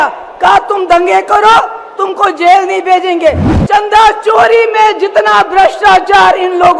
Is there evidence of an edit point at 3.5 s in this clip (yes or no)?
yes